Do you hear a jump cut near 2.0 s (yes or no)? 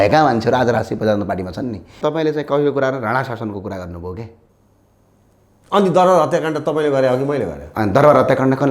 yes